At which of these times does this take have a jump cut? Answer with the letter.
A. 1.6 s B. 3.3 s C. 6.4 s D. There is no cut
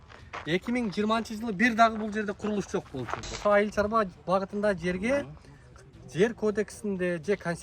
B